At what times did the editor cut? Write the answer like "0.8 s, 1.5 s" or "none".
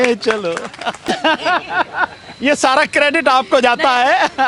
1.1 s

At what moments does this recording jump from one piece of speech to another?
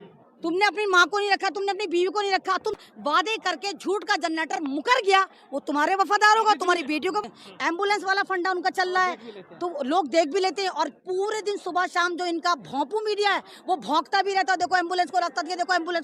2.8 s, 7.3 s

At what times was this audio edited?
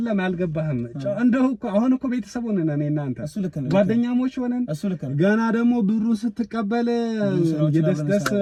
none

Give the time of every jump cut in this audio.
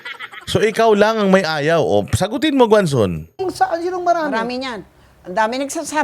none

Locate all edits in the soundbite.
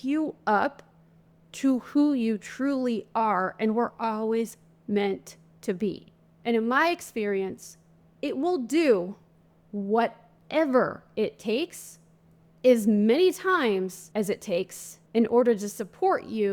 6.3 s, 14.4 s

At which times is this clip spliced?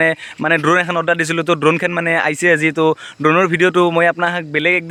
none

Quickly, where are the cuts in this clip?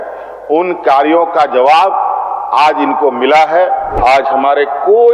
4.0 s

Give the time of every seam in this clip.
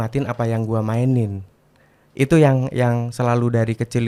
none

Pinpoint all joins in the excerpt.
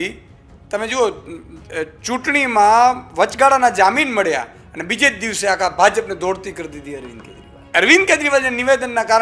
7.6 s

